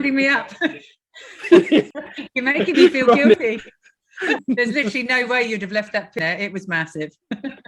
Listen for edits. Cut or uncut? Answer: cut